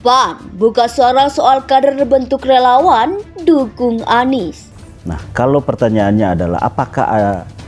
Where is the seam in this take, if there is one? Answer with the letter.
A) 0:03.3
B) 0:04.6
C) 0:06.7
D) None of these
B